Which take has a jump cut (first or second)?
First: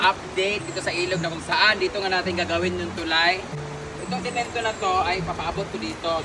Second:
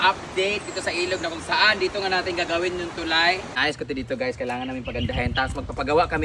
second